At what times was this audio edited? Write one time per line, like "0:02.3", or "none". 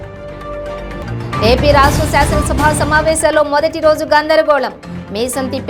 0:01.0